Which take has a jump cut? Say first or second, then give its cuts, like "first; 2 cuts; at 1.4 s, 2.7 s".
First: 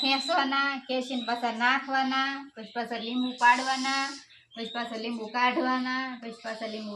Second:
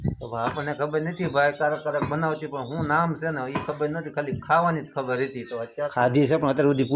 second; 1 cut; at 5.9 s